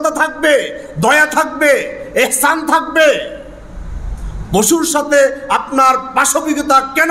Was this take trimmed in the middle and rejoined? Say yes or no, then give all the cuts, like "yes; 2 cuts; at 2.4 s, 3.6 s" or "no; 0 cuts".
no; 0 cuts